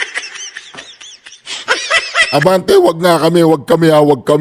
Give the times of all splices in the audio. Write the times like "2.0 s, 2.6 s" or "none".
none